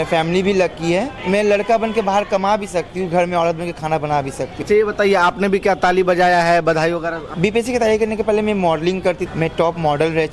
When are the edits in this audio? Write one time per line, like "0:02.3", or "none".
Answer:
0:01.2
0:04.6
0:07.2
0:09.2